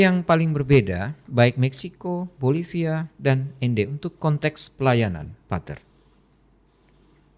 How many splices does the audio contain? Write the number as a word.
zero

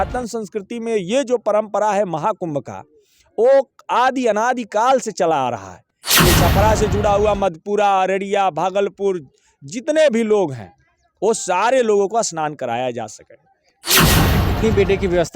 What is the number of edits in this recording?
one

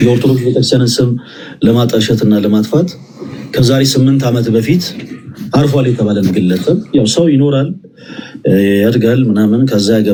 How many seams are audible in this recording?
zero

